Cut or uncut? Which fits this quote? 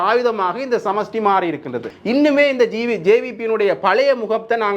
cut